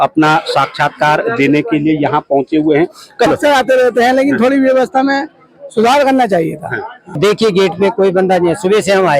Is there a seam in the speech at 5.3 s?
no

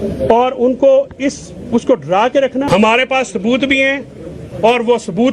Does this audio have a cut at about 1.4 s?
no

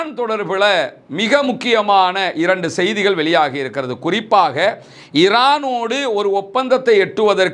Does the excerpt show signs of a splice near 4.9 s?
no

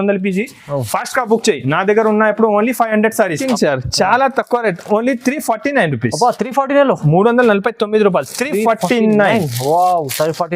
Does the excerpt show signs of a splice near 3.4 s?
yes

